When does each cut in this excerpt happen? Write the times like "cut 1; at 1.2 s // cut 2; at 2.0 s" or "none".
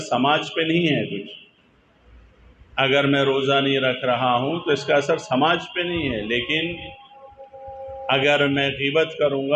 none